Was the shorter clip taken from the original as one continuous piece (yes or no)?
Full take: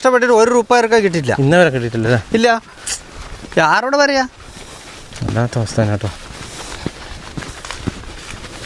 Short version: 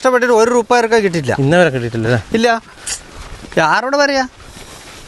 yes